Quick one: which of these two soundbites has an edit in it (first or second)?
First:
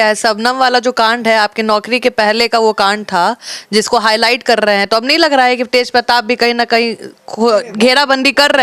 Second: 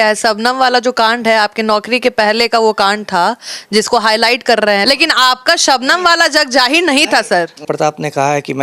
second